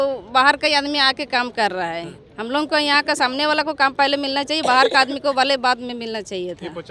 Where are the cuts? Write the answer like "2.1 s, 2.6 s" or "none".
none